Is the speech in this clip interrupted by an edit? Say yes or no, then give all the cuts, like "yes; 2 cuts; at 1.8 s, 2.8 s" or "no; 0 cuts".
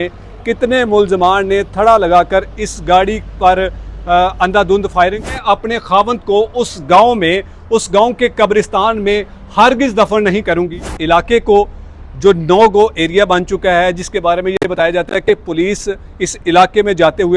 yes; 2 cuts; at 5.3 s, 10.9 s